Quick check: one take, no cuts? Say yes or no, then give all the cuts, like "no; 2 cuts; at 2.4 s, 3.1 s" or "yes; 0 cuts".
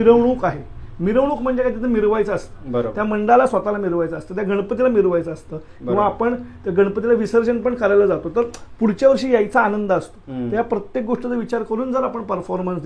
yes; 0 cuts